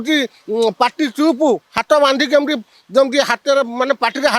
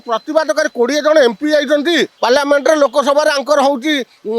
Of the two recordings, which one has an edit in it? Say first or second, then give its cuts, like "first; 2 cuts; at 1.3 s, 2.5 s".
second; 1 cut; at 2.1 s